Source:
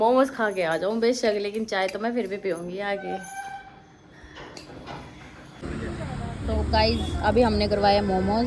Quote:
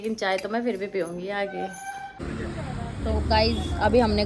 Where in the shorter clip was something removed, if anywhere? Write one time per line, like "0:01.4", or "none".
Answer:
0:02.1